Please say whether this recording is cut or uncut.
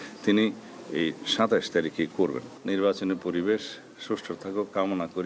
uncut